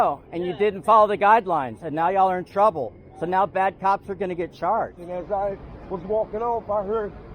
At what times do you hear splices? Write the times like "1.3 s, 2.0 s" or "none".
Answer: 5.0 s